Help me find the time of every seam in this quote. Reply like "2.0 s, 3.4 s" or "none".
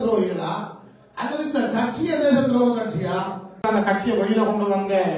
3.6 s